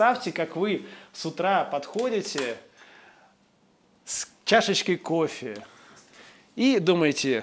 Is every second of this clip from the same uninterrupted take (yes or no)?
yes